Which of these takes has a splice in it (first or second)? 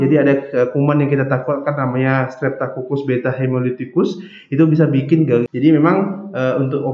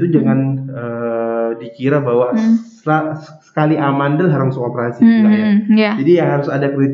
first